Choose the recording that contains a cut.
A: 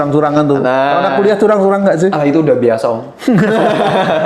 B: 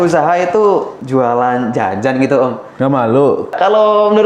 B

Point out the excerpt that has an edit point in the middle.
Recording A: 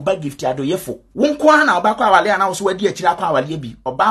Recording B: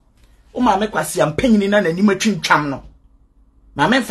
A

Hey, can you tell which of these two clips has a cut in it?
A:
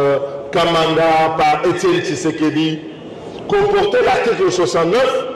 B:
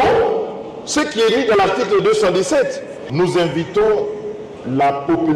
B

